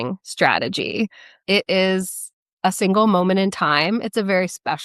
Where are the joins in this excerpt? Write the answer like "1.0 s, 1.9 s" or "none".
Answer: 1.3 s